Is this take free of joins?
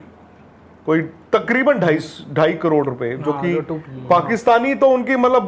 yes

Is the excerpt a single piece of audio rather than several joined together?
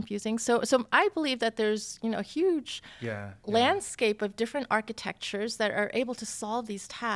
yes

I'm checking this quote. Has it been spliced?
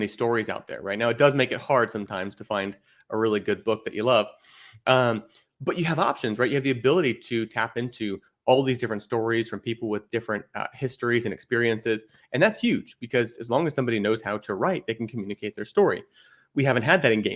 no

